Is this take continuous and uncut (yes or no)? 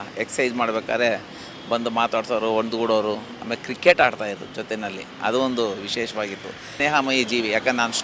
no